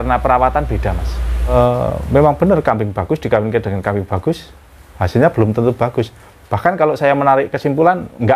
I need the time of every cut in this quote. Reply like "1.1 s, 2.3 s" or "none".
1.5 s